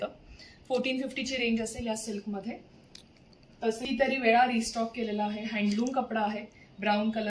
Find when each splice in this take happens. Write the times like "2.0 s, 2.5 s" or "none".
3.8 s